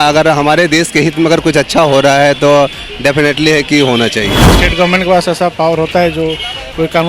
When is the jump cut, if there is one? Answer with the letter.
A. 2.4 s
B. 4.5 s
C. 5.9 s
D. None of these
B